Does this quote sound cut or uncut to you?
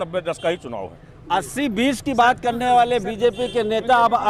uncut